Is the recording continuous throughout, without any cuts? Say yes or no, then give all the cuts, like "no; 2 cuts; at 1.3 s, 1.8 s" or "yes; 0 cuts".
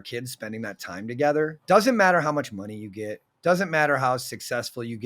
no; 1 cut; at 1.6 s